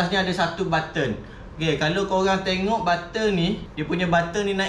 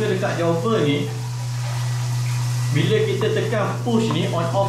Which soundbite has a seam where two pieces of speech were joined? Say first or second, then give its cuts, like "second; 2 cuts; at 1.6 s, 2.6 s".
first; 1 cut; at 3.7 s